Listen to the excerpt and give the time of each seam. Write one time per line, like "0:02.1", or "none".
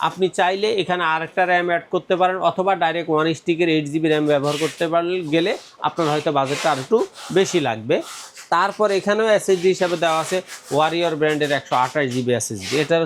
none